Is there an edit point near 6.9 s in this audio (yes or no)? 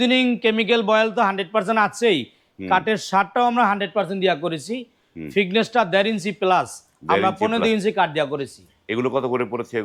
no